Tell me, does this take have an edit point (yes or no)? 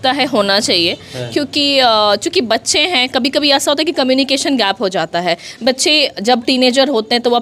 no